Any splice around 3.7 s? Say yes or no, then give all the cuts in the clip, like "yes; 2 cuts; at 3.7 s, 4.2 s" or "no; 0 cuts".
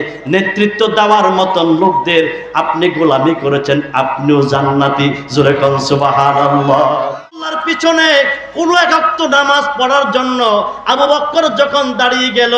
no; 1 cut; at 7.6 s